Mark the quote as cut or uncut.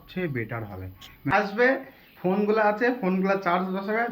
cut